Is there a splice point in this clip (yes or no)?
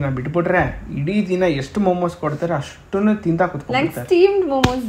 no